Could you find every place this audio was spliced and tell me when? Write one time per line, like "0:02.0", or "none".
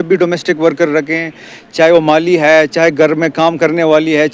none